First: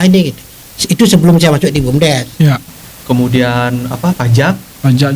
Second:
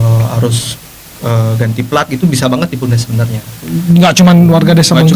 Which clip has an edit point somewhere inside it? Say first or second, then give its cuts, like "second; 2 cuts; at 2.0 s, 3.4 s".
first; 1 cut; at 2.7 s